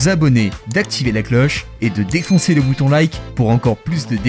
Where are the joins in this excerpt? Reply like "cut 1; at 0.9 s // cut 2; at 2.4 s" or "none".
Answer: none